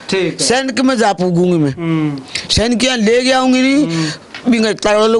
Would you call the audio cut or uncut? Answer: uncut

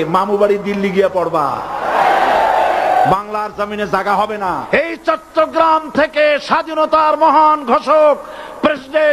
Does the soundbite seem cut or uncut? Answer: cut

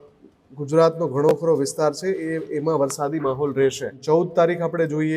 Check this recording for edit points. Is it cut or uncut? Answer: cut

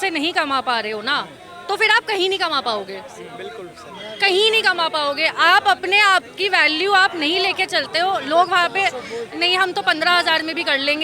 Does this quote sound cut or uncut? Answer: uncut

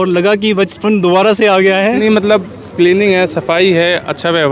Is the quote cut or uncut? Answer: cut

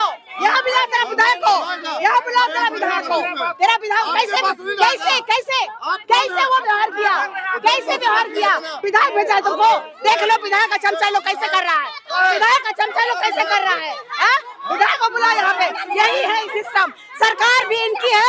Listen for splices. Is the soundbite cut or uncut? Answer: uncut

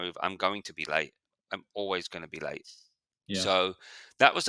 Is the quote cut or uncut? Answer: uncut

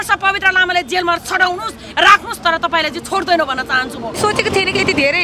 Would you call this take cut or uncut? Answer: cut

